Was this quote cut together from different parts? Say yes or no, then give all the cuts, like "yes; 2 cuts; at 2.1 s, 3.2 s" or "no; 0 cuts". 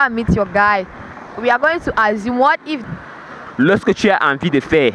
yes; 1 cut; at 2.8 s